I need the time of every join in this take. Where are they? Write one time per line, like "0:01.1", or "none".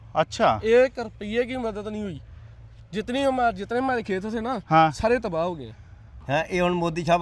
0:06.1